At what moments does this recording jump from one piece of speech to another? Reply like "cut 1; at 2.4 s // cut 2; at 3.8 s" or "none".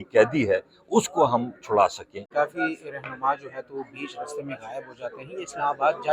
cut 1; at 2.2 s